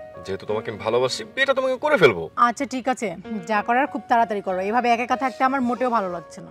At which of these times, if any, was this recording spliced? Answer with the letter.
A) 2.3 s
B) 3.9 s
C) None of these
C